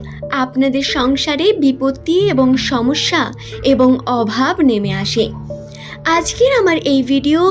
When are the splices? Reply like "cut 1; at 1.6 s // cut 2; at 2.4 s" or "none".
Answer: none